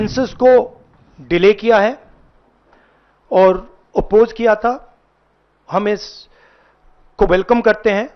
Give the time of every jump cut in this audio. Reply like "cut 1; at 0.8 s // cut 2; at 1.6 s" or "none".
none